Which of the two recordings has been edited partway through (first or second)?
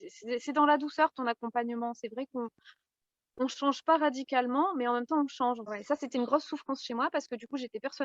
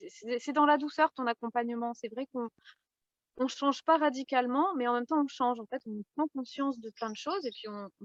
first